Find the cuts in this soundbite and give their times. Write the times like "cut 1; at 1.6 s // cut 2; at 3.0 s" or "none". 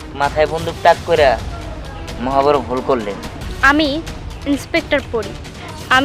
cut 1; at 3.4 s